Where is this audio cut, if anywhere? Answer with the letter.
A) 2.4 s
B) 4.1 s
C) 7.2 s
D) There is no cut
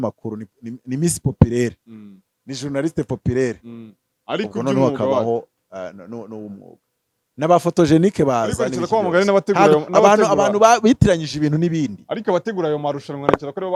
D